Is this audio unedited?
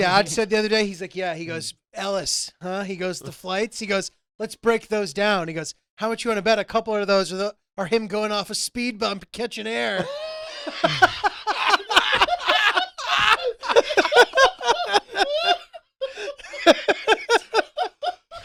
yes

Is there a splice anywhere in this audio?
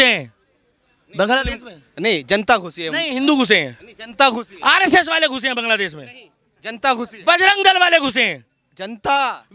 no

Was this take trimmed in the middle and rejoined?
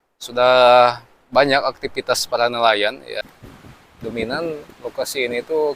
yes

